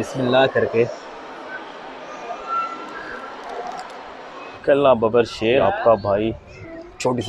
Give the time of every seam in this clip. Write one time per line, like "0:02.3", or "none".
0:04.6
0:05.6